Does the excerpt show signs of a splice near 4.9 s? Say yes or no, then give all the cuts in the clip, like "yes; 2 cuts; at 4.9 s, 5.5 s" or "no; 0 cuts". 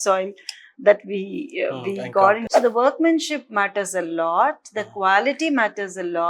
no; 1 cut; at 2.5 s